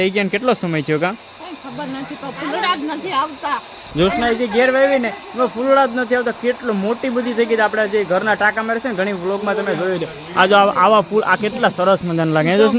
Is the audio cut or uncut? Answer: uncut